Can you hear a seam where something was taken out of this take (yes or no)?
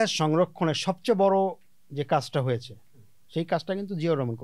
no